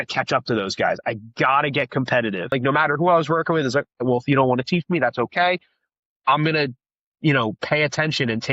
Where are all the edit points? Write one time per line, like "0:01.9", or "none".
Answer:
0:02.5